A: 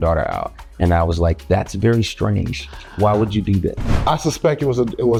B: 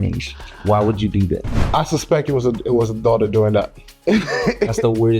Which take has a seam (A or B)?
B